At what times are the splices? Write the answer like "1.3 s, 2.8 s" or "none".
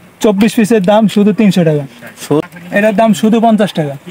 2.4 s